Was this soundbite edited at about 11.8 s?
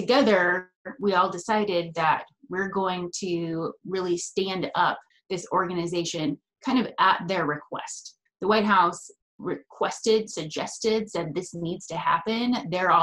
no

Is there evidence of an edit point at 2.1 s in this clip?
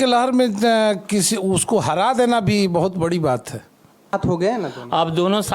no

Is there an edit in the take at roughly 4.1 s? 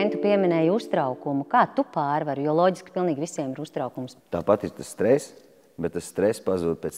yes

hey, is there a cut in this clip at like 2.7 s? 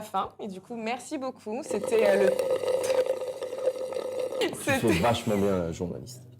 no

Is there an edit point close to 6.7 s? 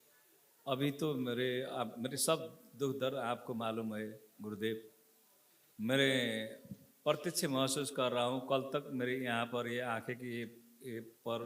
no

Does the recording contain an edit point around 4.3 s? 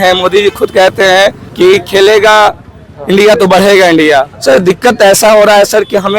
yes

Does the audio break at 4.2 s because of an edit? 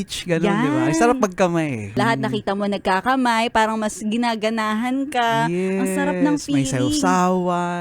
no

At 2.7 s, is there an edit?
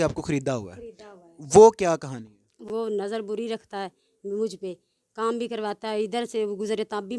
yes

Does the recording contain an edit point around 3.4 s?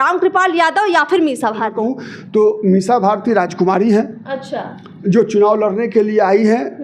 no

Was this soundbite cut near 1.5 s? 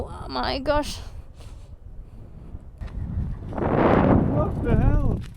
no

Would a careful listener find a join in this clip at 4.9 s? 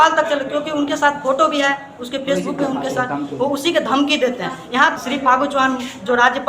yes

